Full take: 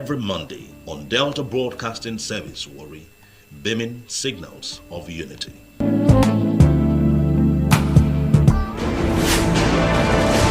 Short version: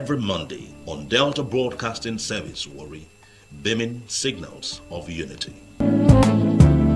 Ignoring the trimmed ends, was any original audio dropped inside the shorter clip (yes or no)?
no